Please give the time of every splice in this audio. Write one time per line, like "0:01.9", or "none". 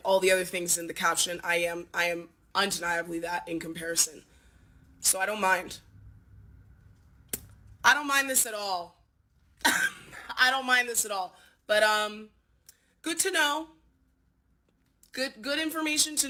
none